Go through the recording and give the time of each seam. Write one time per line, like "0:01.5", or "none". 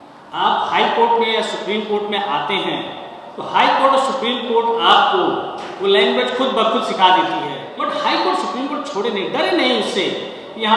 0:07.7